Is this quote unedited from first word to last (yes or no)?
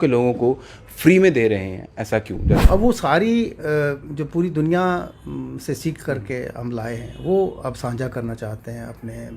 no